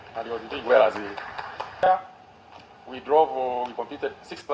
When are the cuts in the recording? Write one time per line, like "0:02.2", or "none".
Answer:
0:01.7